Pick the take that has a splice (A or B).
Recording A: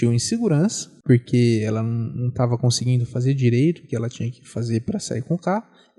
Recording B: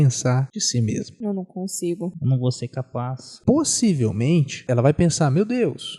B